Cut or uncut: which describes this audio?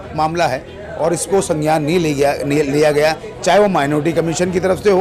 uncut